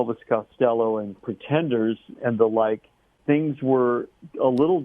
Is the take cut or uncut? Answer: cut